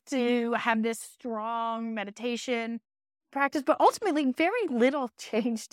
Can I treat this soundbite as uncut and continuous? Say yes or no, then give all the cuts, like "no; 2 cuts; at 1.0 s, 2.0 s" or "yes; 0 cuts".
no; 1 cut; at 3.3 s